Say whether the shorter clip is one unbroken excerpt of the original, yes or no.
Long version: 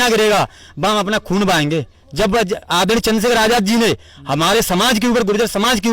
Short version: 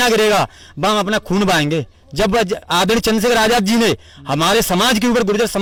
yes